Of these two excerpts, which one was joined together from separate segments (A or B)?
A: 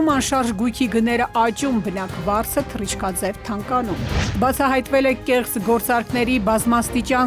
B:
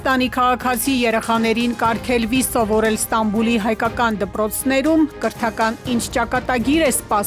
A